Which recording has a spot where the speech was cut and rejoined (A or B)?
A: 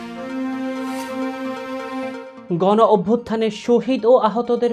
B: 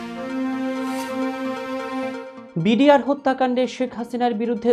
A